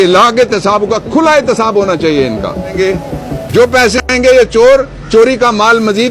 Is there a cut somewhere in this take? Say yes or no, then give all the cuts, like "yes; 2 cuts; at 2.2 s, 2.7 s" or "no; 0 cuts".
yes; 1 cut; at 2.8 s